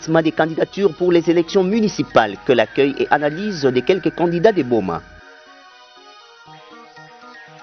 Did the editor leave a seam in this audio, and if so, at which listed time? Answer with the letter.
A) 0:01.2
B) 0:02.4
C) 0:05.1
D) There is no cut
D